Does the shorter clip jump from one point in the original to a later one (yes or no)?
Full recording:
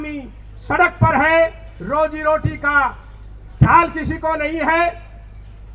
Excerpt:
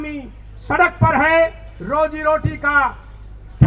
no